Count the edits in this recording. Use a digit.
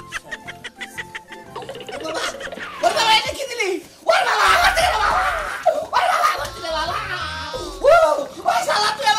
0